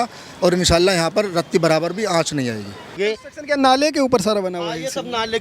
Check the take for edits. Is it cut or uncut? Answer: cut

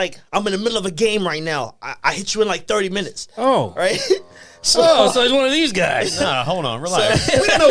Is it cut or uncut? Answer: uncut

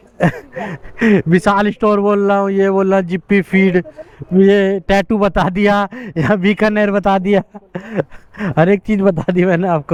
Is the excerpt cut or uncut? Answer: uncut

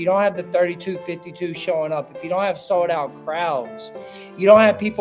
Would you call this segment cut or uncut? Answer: uncut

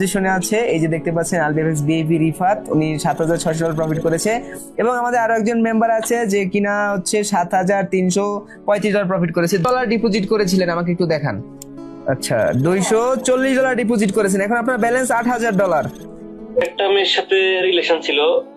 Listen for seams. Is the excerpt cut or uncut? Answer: cut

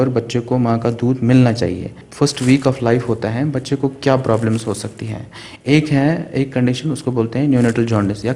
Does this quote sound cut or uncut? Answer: cut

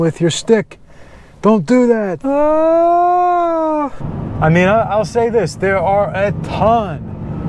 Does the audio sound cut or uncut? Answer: cut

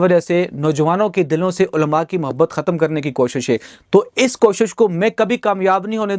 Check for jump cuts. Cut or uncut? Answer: uncut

